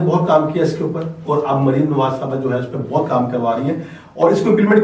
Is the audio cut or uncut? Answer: uncut